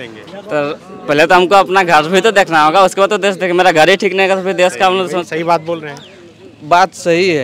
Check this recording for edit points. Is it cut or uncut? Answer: uncut